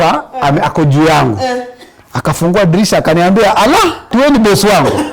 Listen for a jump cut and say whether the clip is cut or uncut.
cut